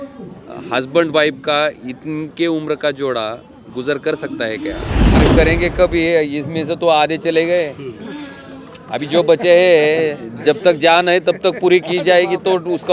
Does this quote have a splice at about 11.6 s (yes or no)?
no